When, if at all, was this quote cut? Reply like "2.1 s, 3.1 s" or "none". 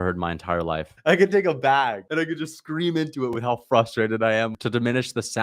0.9 s, 2.0 s, 4.5 s